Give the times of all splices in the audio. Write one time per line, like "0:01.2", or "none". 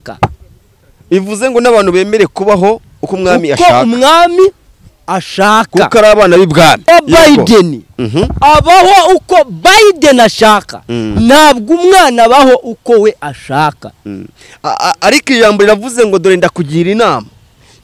0:06.9